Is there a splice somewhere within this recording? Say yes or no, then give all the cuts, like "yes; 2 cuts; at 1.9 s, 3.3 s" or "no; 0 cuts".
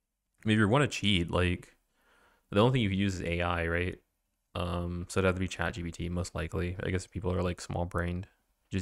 no; 0 cuts